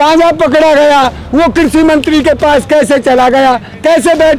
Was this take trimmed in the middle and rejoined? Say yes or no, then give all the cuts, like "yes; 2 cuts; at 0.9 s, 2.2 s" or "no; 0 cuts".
no; 0 cuts